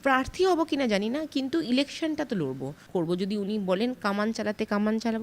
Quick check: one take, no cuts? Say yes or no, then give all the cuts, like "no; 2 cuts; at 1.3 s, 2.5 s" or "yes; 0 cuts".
no; 1 cut; at 2.7 s